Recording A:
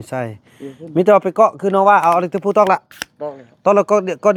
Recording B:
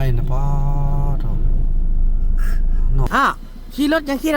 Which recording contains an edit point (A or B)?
B